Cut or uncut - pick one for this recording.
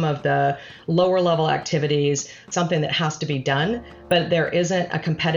cut